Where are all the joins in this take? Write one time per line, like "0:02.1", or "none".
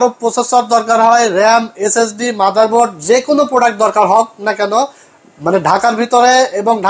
none